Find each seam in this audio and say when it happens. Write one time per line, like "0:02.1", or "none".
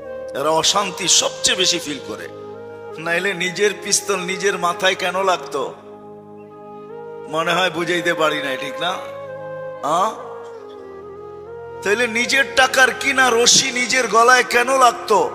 0:10.3
0:11.8